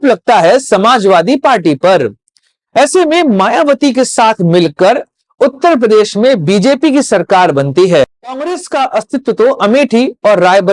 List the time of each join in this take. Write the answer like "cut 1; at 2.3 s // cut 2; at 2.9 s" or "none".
cut 1; at 8.3 s